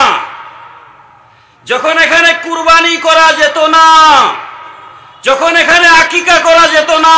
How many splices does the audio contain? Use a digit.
0